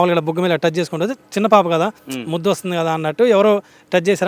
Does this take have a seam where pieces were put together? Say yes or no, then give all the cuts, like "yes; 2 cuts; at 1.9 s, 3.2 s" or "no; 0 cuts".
no; 0 cuts